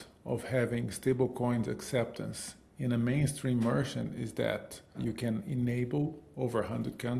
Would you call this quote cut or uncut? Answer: cut